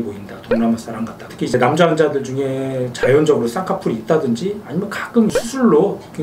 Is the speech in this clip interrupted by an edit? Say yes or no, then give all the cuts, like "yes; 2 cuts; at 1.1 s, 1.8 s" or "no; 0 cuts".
yes; 1 cut; at 1.3 s